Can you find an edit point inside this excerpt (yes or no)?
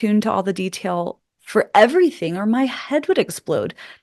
no